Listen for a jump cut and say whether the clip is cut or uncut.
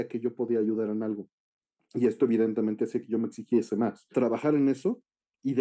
cut